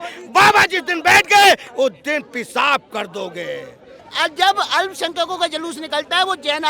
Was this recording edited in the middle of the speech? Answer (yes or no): yes